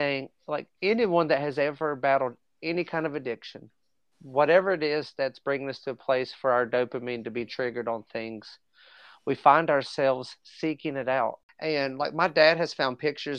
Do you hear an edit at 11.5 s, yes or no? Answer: yes